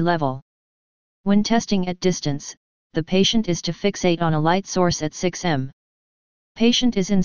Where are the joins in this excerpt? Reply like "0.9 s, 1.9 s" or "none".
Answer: none